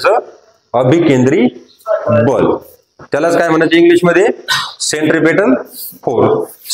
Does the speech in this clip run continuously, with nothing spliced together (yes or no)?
yes